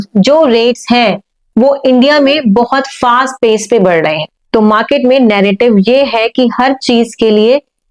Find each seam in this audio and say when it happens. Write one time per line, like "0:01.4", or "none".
0:04.4